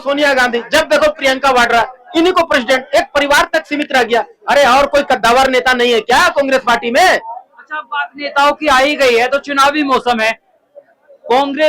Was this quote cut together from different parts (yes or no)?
no